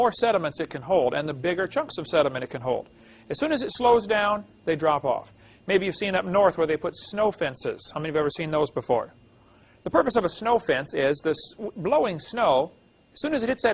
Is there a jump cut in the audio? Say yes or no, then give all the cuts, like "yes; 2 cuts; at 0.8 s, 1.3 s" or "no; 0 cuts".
yes; 1 cut; at 5.0 s